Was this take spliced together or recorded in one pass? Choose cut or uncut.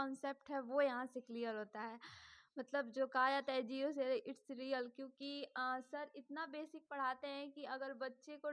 uncut